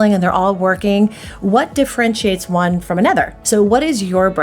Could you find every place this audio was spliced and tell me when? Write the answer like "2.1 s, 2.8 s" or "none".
3.4 s